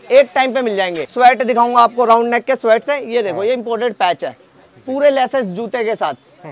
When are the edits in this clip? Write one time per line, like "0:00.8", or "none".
0:01.0

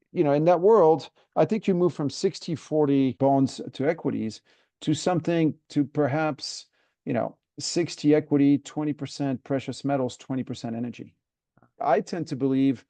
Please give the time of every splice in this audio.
0:03.1
0:11.8

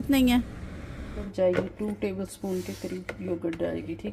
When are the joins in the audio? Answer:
0:01.3

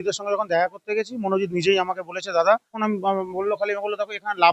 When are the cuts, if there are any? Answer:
0:02.8

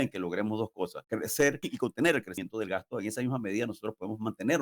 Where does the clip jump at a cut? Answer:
0:01.0
0:01.7
0:02.3

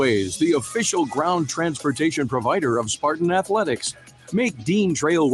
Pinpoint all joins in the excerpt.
none

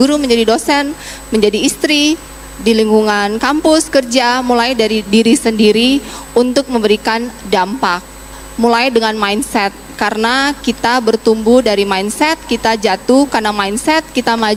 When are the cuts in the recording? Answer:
none

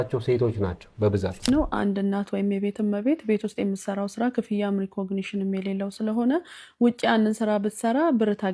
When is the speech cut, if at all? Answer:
0:01.5

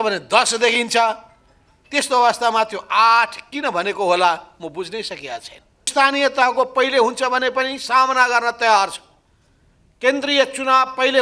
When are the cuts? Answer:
0:05.9

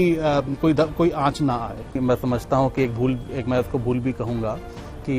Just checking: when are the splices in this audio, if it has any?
0:02.0

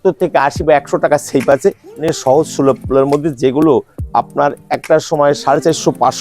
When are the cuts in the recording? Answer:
0:01.9

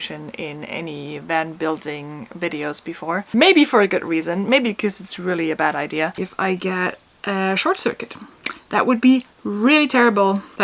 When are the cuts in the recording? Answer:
0:03.3
0:06.2

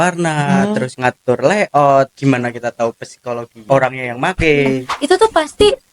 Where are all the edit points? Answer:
0:00.9
0:02.1
0:03.6
0:04.9

